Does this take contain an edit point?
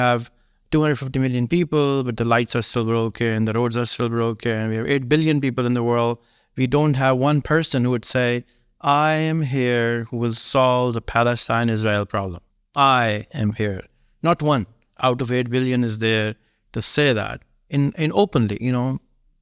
no; 0 cuts

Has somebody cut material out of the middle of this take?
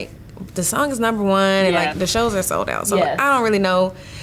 yes; 1 cut; at 1.9 s

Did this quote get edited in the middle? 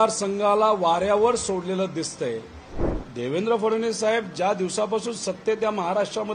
yes; 1 cut; at 2.9 s

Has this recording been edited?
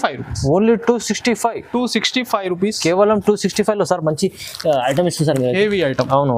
no; 0 cuts

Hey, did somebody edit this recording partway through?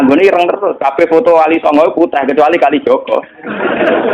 no; 0 cuts

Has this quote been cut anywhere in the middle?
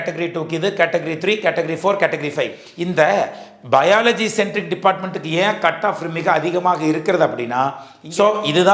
yes; 2 cuts; at 2.7 s, 7.9 s

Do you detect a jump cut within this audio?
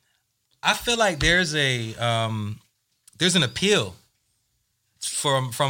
no; 0 cuts

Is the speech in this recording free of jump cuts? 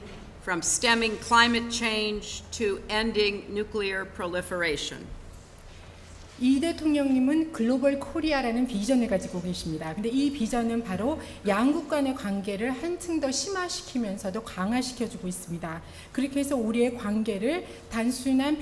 yes; 0 cuts

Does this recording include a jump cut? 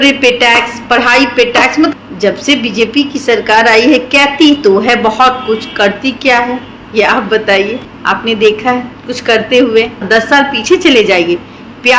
no; 0 cuts

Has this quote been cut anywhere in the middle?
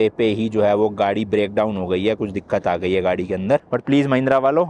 yes; 1 cut; at 3.6 s

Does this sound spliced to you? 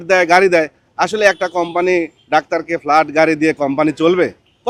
no; 0 cuts

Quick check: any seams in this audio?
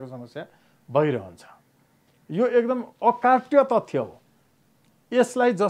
no; 0 cuts

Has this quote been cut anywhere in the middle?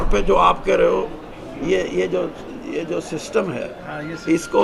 no; 0 cuts

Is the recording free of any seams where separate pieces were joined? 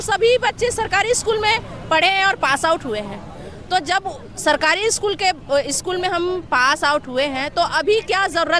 yes; 0 cuts

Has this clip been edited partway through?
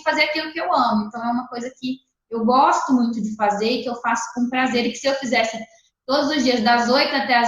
no; 0 cuts

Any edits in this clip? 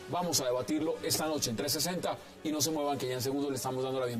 no; 0 cuts

